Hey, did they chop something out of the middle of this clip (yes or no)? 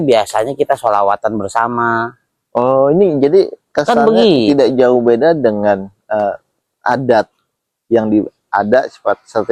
no